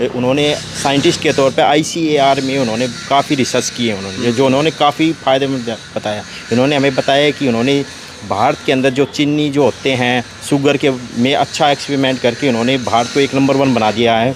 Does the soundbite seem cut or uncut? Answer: uncut